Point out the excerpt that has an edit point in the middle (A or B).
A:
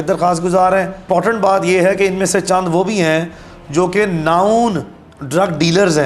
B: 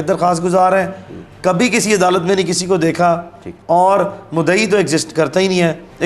A